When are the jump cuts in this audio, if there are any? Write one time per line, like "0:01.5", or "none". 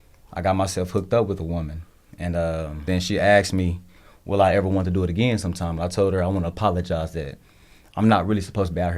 0:02.9